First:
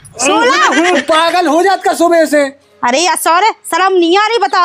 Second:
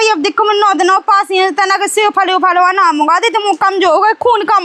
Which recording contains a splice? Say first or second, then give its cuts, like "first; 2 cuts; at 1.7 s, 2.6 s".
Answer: first; 1 cut; at 0.9 s